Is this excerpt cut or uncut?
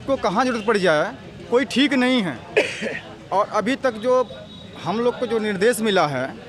uncut